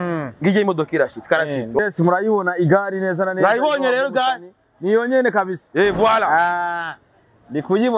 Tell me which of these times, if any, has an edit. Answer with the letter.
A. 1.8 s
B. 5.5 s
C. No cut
A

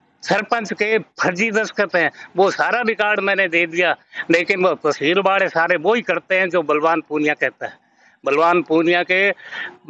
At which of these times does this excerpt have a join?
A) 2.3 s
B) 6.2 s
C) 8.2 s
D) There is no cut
D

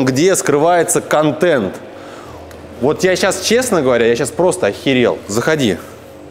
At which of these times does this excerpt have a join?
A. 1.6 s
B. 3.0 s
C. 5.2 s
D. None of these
D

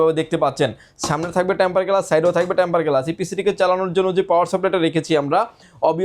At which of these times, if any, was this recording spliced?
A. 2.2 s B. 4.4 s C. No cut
C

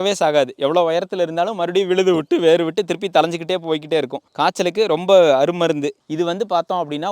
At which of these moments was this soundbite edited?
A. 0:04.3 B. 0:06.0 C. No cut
B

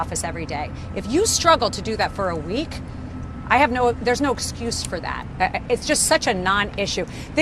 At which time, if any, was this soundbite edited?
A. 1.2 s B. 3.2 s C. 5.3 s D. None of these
C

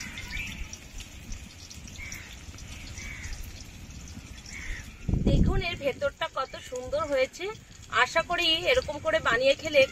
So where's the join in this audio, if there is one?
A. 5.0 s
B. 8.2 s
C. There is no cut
A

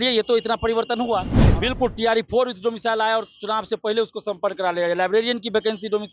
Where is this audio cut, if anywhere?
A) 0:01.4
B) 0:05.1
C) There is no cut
A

